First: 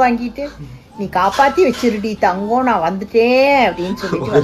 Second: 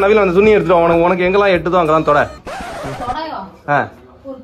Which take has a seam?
second; 1 cut; at 0.9 s

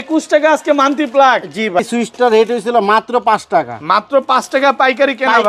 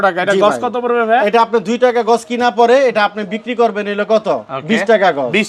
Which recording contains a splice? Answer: first; 1 cut; at 1.8 s

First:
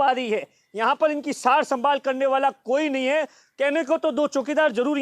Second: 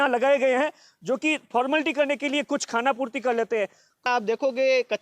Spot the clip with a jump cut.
second; 1 cut; at 4.1 s

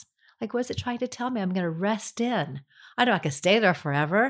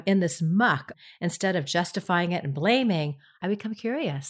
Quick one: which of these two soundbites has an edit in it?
second; 2 cuts; at 1.0 s, 3.4 s

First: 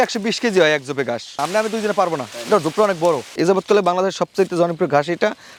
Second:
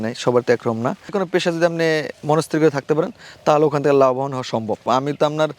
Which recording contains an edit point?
second; 1 cut; at 1.1 s

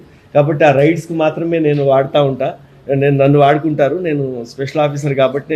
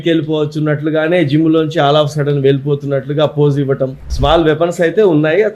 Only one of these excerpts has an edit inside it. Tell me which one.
second; 1 cut; at 4.1 s

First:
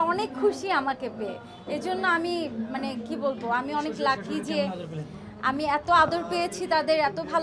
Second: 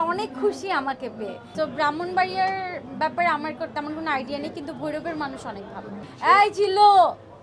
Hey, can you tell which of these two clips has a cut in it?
second; 2 cuts; at 1.4 s, 6.0 s

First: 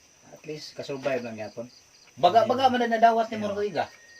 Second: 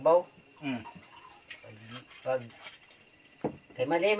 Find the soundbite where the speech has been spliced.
first; 1 cut; at 2.0 s

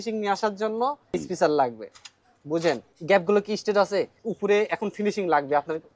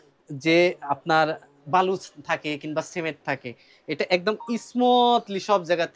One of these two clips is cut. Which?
first; 3 cuts; at 1.0 s, 2.9 s, 4.2 s

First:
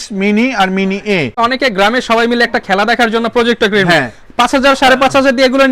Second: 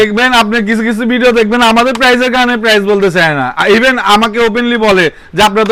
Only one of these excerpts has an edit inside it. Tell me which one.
first; 1 cut; at 1.3 s

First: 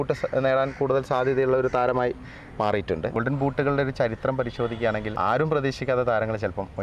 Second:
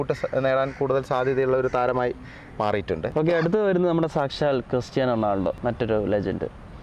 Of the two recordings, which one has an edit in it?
first; 2 cuts; at 3.2 s, 5.1 s

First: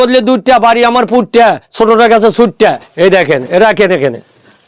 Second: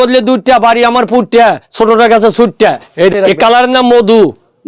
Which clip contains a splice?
second; 1 cut; at 3.1 s

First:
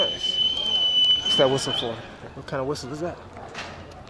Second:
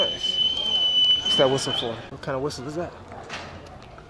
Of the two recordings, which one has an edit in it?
second; 1 cut; at 2.1 s

